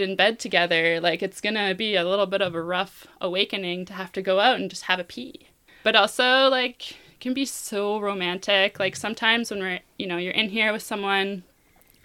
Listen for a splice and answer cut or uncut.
cut